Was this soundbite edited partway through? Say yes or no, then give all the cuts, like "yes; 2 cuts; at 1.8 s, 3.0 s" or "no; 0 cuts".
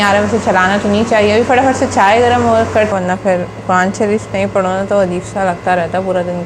yes; 1 cut; at 2.9 s